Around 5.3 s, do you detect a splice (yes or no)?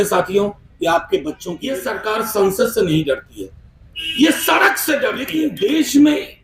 yes